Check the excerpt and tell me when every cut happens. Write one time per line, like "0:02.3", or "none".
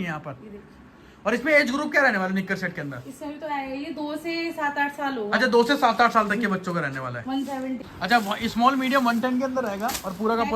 0:07.9